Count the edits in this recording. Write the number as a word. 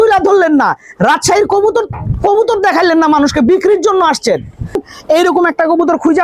one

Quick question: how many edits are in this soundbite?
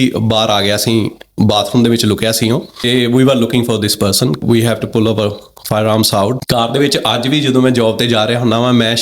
three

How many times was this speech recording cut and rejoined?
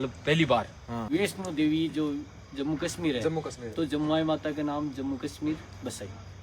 one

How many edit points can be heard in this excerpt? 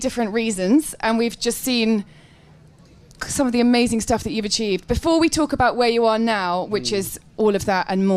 one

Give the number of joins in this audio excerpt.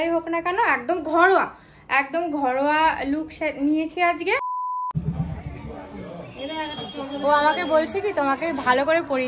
one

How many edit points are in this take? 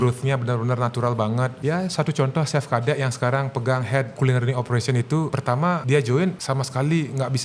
four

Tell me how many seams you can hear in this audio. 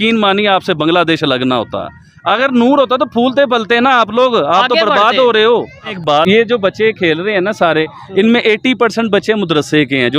one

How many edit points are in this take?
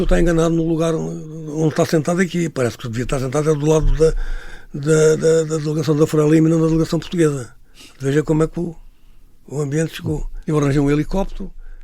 one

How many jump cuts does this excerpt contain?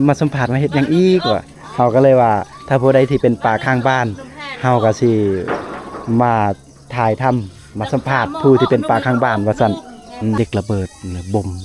one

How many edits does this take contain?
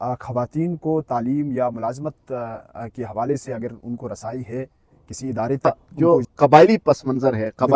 one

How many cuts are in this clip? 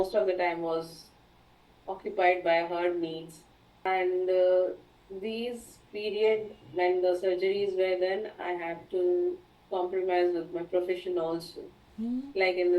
one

